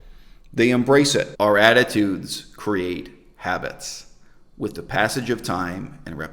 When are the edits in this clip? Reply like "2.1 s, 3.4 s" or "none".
1.3 s